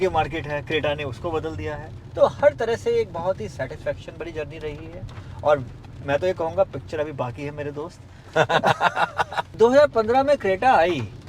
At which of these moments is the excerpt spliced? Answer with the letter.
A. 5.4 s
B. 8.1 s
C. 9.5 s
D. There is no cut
C